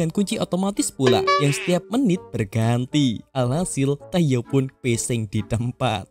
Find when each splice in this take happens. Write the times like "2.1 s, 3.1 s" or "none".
none

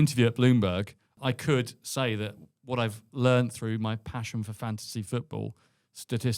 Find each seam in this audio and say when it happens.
1.1 s

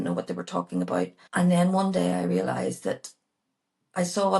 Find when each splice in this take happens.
1.2 s

